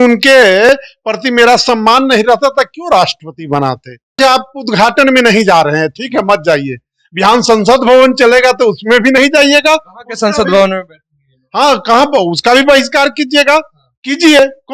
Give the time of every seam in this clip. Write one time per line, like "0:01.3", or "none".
0:04.2